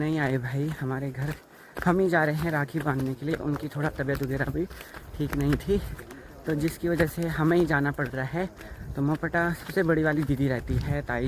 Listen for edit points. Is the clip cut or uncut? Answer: uncut